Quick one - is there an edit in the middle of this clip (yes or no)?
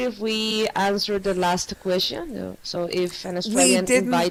no